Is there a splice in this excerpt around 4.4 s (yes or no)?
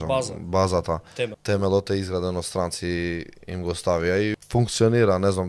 yes